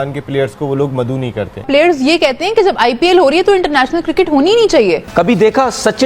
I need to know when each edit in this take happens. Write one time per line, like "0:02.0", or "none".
0:01.7
0:05.1

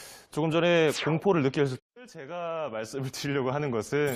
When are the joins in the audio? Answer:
none

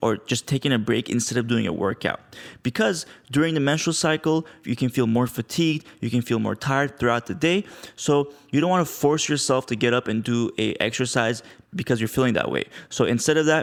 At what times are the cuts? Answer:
none

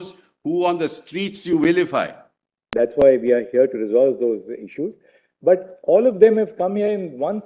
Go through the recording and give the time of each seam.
0:02.6

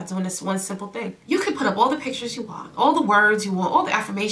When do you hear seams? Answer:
0:01.1

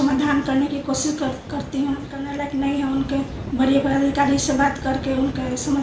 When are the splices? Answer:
0:02.3

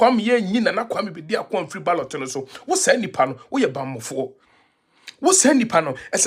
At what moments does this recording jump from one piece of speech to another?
none

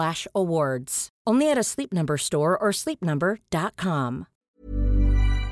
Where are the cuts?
0:04.3

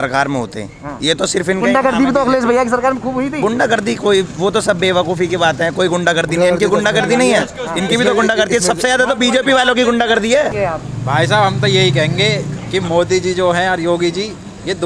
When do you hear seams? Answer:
0:10.5

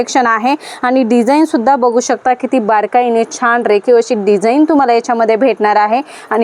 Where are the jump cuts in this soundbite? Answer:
none

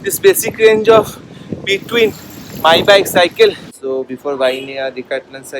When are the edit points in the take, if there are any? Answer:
0:03.7

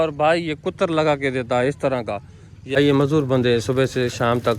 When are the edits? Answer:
0:02.8

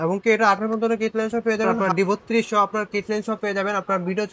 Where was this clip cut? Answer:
0:01.7

